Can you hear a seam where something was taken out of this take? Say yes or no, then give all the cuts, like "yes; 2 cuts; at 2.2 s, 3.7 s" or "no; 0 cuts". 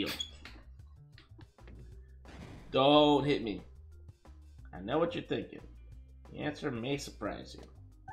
yes; 1 cut; at 1.4 s